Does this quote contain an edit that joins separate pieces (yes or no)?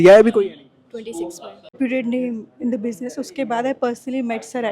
yes